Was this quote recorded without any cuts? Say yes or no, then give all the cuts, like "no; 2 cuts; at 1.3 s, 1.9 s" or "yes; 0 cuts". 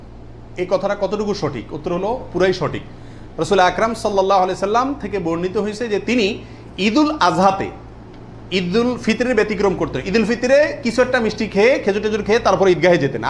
yes; 0 cuts